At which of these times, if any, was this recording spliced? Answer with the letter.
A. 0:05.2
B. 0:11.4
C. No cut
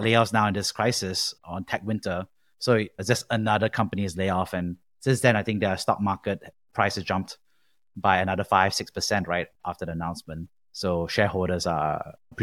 C